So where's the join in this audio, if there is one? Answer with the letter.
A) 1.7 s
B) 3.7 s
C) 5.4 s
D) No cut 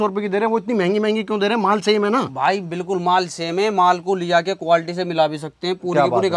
D